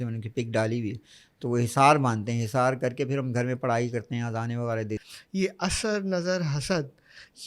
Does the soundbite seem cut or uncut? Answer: cut